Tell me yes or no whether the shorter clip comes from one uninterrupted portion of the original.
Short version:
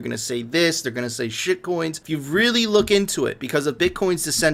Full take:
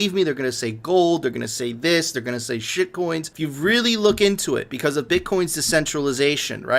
yes